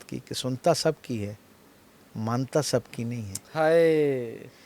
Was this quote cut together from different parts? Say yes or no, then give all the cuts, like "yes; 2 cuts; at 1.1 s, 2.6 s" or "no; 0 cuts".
no; 0 cuts